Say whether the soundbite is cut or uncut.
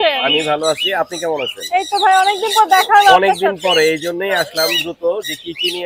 uncut